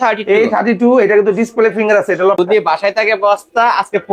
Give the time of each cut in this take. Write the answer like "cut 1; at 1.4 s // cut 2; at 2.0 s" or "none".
cut 1; at 2.4 s